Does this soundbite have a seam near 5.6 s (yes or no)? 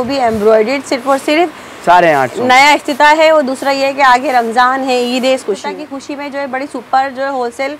yes